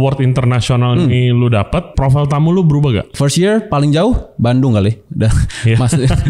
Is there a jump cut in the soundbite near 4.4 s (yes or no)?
no